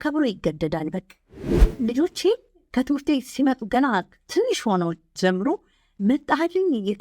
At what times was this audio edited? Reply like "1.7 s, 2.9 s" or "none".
1.6 s